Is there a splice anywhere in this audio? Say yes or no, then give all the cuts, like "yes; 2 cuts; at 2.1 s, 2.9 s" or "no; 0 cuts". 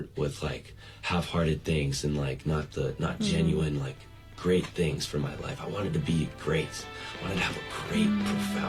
no; 0 cuts